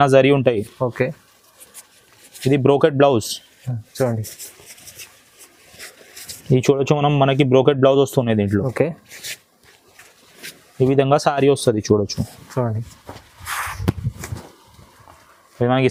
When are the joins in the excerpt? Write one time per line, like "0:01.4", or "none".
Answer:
none